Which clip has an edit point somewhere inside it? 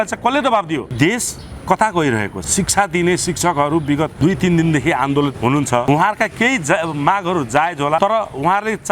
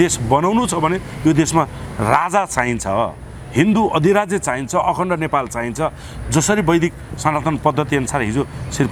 first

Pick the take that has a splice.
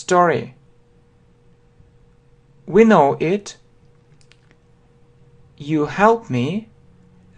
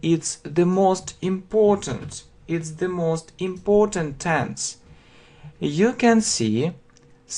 first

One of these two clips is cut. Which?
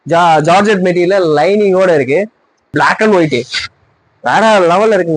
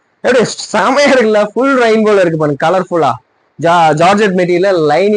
first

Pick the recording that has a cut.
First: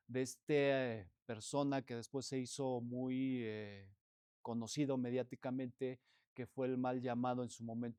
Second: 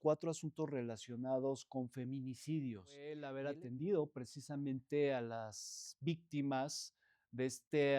second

